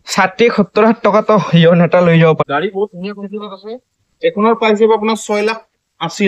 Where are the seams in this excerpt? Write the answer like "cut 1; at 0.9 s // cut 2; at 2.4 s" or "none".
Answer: cut 1; at 2.4 s